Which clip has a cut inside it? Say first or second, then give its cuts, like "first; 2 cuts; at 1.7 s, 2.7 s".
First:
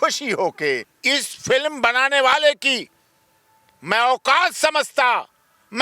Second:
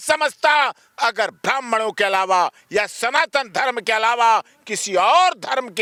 first; 1 cut; at 0.9 s